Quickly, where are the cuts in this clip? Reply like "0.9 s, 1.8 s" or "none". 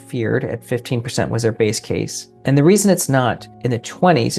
2.2 s, 3.5 s